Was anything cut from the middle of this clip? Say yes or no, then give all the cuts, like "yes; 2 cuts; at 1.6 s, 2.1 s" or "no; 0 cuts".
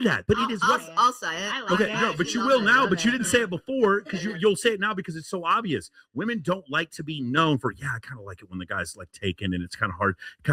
no; 0 cuts